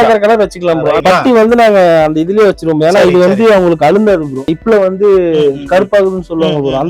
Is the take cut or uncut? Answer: cut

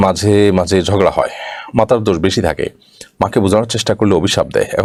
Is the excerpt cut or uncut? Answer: uncut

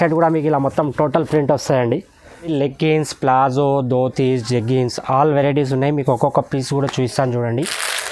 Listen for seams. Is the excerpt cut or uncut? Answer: cut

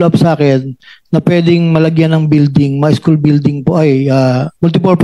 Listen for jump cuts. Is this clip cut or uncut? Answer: uncut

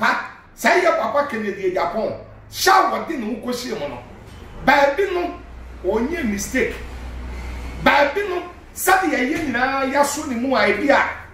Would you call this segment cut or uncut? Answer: uncut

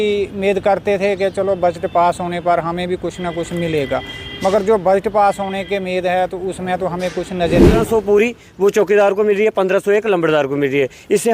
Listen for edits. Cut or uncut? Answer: cut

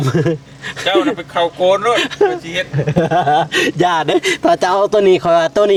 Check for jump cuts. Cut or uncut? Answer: uncut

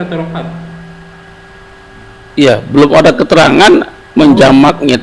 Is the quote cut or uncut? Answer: uncut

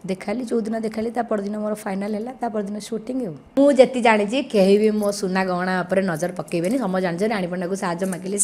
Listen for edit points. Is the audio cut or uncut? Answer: cut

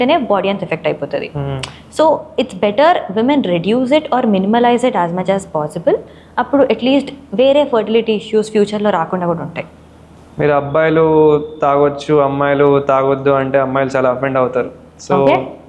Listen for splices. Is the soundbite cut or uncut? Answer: uncut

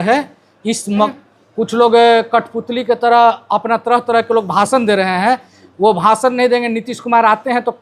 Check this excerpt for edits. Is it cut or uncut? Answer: cut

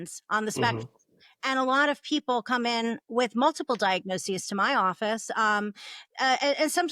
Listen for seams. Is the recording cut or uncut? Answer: uncut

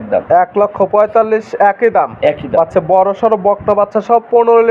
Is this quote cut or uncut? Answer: uncut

